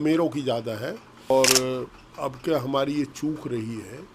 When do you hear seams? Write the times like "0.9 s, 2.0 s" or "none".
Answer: 1.3 s